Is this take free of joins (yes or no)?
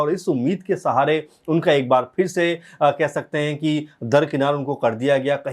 yes